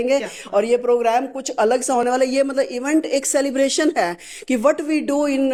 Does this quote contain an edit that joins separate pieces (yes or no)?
no